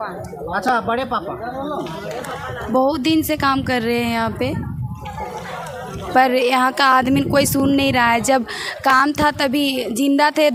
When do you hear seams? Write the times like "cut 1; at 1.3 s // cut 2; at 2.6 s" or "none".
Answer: none